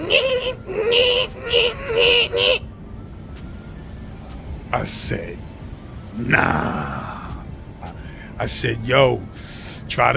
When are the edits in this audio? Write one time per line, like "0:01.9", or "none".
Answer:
0:07.9